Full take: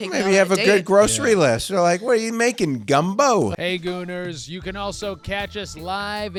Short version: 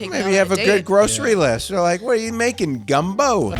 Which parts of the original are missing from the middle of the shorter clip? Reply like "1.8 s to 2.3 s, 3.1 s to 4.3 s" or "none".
none